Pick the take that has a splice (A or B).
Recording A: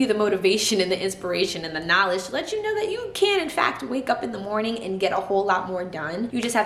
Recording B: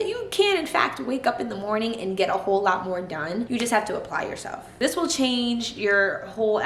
B